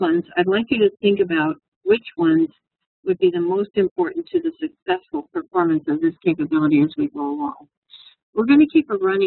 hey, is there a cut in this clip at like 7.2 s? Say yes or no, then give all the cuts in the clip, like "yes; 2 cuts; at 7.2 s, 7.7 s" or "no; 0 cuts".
no; 1 cut; at 3.6 s